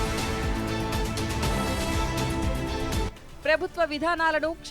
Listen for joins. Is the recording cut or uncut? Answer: cut